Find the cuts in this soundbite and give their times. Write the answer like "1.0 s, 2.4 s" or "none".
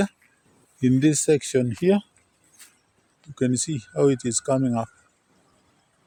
none

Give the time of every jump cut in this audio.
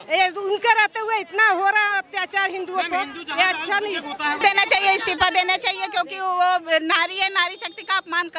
4.4 s

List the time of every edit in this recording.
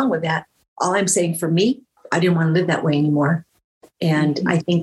1.9 s

